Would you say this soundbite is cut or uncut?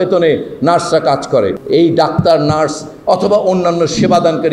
cut